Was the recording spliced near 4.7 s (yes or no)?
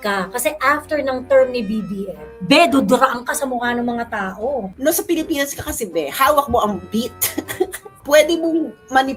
yes